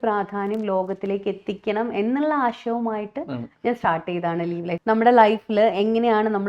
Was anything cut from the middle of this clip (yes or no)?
yes